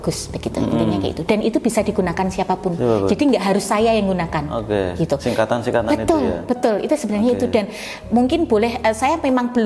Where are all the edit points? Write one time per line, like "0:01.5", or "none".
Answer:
none